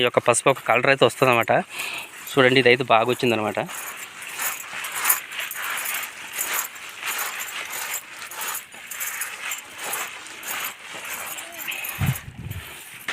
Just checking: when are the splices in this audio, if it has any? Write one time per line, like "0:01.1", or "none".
none